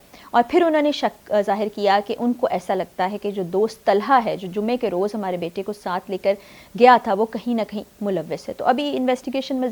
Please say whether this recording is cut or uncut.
uncut